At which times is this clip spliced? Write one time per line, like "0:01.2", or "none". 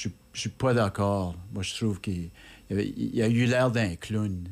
none

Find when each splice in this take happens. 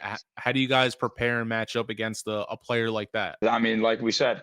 0:03.4

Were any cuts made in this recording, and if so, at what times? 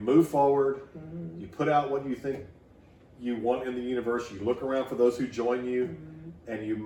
none

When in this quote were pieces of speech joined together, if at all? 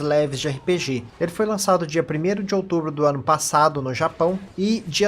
0:03.5

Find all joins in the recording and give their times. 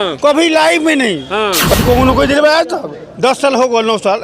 0:01.7

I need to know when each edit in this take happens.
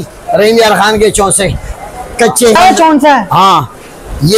0:02.6

